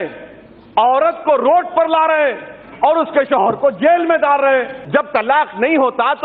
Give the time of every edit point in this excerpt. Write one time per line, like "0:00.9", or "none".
0:04.8

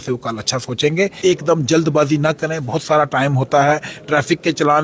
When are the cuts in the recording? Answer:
0:01.2

